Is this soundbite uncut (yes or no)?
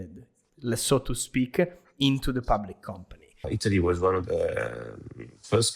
no